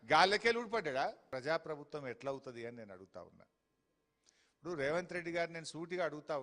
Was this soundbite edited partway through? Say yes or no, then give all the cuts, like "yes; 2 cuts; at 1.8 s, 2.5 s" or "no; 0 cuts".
yes; 1 cut; at 1.3 s